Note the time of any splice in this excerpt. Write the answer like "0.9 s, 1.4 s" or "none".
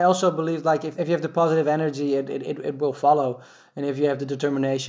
0.9 s